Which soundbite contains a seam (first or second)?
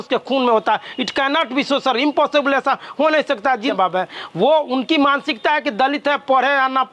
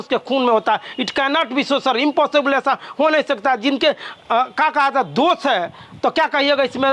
first